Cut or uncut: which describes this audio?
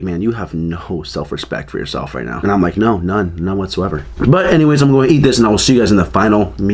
uncut